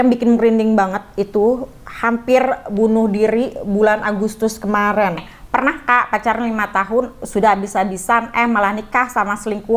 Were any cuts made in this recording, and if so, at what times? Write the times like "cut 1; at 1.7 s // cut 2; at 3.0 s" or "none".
cut 1; at 5.3 s